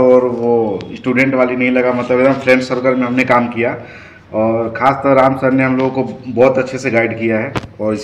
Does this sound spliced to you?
no; 0 cuts

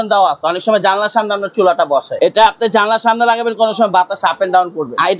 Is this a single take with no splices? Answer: no; 1 cut; at 2.1 s

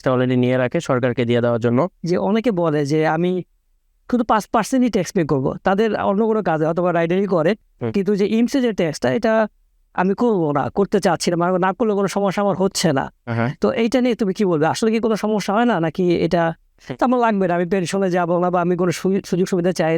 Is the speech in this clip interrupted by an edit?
yes; 2 cuts; at 2.0 s, 16.8 s

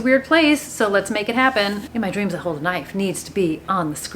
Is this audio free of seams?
no; 1 cut; at 1.8 s

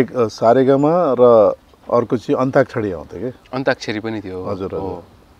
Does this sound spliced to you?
yes; 1 cut; at 1.7 s

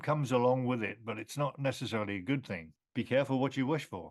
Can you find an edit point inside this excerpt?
yes; 1 cut; at 2.8 s

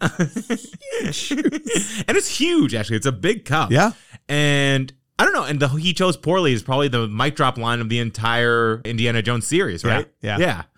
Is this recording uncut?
no; 1 cut; at 8.9 s

